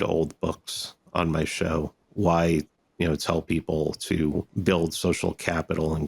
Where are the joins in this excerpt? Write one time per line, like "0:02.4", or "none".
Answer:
0:02.0
0:04.5